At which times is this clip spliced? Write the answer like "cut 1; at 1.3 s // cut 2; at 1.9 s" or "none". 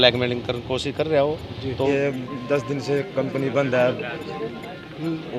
cut 1; at 1.9 s